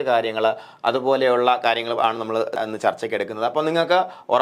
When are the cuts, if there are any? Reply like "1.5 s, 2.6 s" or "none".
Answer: 2.6 s

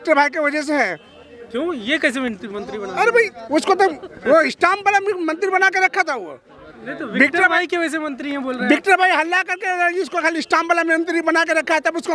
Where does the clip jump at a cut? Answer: none

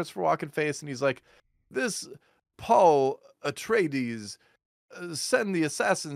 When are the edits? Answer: none

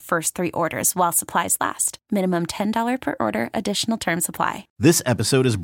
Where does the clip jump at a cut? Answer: 4.6 s

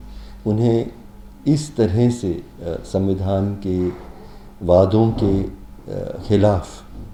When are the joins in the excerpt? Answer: none

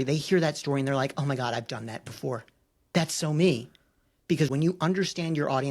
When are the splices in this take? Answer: 4.5 s

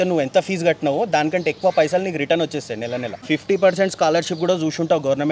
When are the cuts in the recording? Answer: 3.2 s

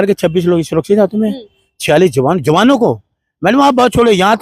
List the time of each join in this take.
none

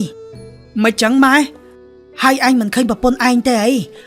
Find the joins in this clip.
1.7 s

